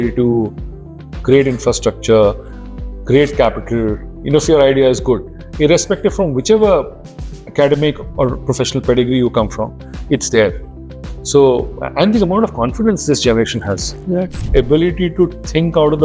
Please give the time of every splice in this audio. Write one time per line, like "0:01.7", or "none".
0:14.4